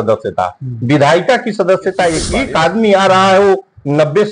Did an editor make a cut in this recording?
yes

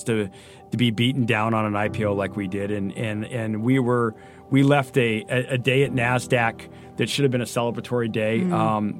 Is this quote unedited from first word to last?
yes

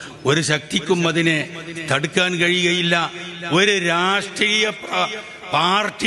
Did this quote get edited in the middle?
no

